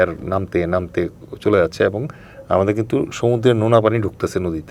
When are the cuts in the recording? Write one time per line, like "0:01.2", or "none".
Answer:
none